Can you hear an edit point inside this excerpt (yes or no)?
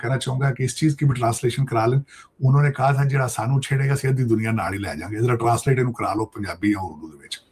no